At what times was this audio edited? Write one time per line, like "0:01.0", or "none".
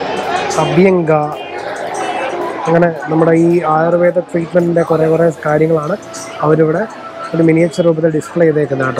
none